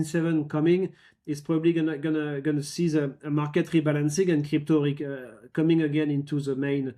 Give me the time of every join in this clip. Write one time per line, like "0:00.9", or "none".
none